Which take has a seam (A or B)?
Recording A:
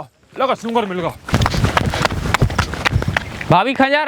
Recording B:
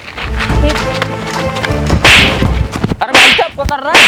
A